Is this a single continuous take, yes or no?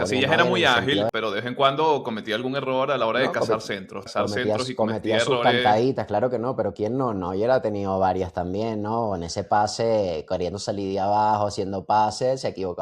no